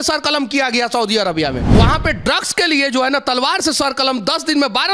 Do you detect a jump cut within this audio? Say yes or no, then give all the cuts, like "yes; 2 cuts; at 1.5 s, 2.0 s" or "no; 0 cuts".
yes; 1 cut; at 1.8 s